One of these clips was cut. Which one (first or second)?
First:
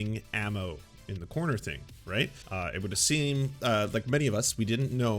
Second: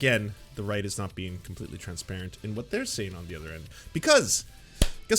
first